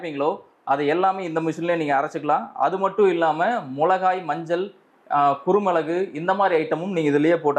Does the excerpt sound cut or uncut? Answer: uncut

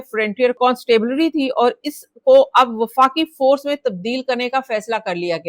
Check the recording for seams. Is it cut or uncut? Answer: uncut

